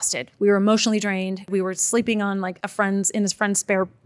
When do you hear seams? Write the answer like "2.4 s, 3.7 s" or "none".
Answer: 1.5 s